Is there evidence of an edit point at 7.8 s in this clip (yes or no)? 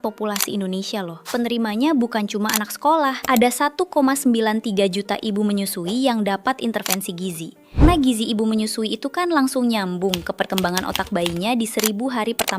yes